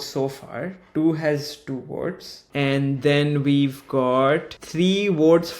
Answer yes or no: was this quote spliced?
yes